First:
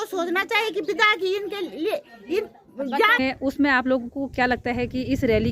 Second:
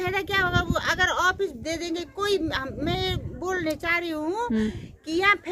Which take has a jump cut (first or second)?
first